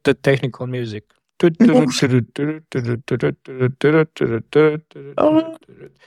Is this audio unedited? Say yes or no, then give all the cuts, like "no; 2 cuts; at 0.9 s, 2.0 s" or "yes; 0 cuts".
yes; 0 cuts